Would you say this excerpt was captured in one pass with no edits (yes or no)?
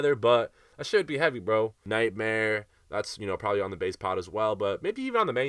no